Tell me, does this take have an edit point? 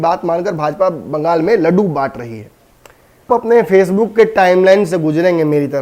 yes; 1 cut; at 3.3 s

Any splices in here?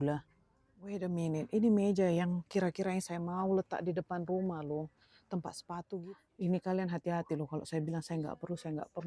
yes; 2 cuts; at 0.9 s, 5.9 s

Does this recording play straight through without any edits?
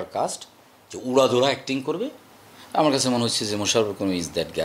yes; 0 cuts

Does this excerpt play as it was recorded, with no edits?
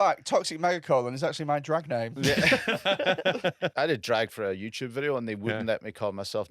no; 1 cut; at 3.7 s

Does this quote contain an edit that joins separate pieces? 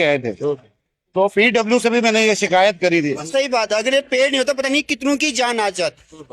yes; 1 cut; at 3.2 s

